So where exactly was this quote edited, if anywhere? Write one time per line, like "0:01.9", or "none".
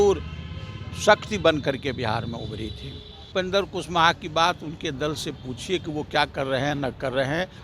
0:03.2